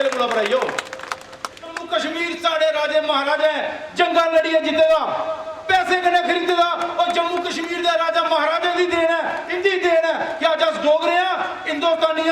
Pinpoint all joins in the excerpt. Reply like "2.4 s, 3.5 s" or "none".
1.8 s